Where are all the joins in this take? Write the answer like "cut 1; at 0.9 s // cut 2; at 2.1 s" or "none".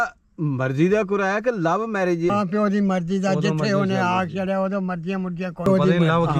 none